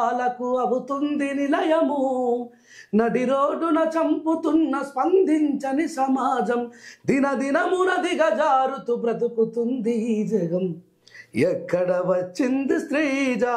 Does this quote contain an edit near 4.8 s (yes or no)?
no